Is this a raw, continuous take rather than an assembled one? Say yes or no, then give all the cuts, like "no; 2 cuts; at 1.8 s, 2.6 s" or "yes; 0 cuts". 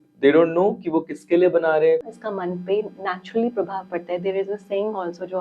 no; 1 cut; at 2.0 s